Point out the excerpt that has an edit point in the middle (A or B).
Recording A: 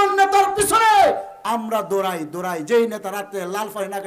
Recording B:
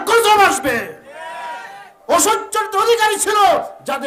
B